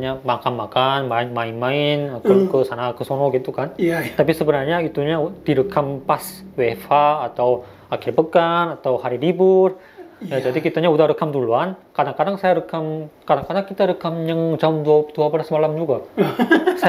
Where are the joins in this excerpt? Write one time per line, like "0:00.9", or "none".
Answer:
none